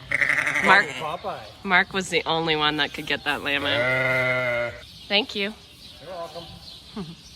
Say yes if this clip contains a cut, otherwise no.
yes